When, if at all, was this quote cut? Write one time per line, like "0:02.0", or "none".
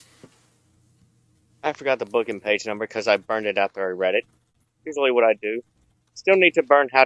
0:04.4